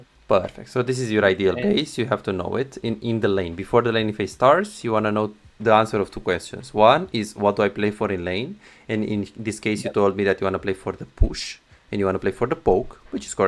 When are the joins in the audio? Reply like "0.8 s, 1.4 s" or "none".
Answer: none